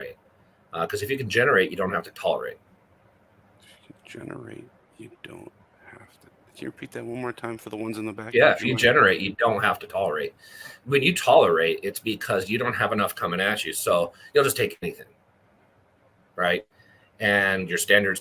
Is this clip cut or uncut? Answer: uncut